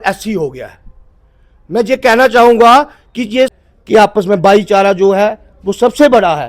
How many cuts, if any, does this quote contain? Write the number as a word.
one